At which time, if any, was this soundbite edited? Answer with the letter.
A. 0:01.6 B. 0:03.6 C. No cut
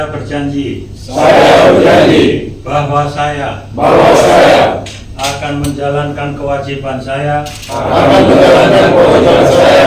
C